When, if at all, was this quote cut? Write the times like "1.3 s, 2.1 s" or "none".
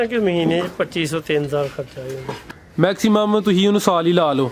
2.4 s